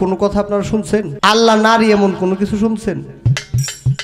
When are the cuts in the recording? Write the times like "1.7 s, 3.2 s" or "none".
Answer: 1.1 s